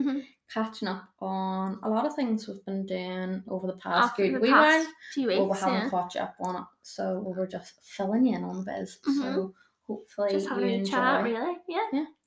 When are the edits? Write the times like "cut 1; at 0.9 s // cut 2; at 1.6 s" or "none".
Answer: none